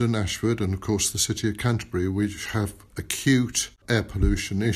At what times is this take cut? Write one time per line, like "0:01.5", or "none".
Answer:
0:03.8